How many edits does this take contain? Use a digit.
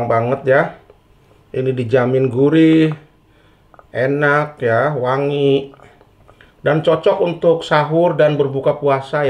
0